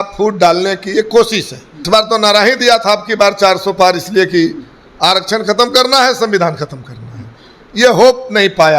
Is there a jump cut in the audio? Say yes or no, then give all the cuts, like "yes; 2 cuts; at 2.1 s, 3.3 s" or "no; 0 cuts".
yes; 1 cut; at 1.8 s